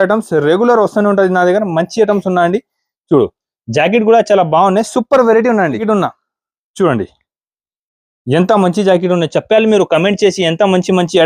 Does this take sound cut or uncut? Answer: cut